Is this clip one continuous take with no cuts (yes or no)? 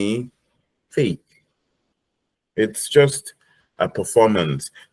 yes